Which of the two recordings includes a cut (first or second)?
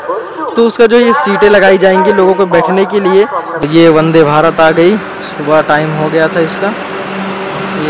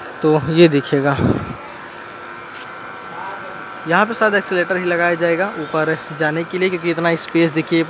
first